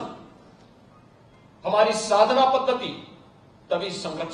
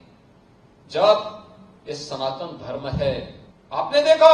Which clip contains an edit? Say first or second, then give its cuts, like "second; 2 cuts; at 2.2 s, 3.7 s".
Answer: second; 1 cut; at 3.4 s